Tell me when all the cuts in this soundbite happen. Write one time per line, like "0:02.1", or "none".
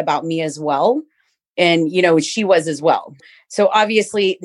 none